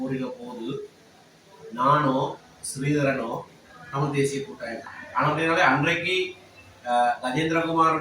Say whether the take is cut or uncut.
cut